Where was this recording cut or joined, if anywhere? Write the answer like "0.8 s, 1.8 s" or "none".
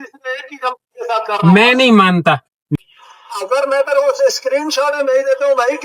2.8 s